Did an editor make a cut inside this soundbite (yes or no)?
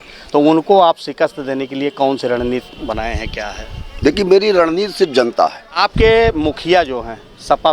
yes